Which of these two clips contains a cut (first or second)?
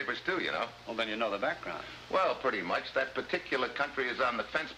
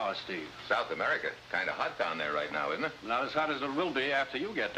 second